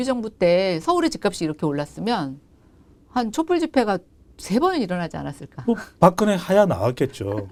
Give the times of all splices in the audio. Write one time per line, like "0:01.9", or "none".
none